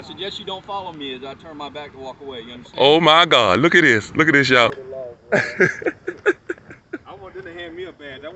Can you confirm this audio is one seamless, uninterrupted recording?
no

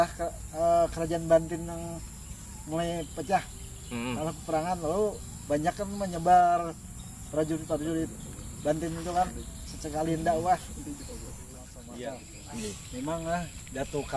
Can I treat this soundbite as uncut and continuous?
no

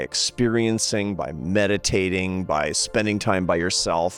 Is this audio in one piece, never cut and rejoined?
yes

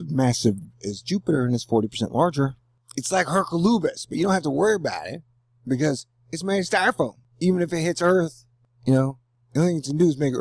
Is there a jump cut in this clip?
no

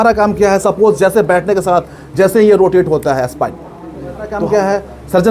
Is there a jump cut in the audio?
yes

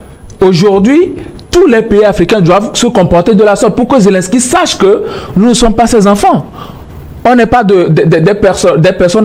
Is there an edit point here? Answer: no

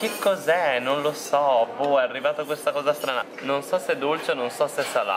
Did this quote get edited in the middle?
yes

